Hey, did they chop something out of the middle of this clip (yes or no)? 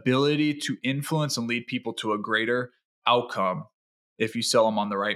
no